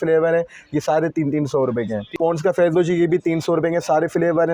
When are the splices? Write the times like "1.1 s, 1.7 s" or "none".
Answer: 2.2 s